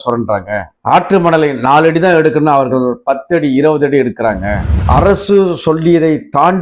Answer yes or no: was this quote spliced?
yes